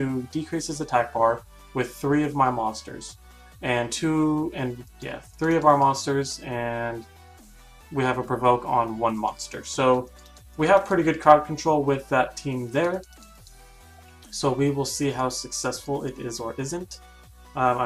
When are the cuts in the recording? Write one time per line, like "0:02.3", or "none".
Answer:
0:02.3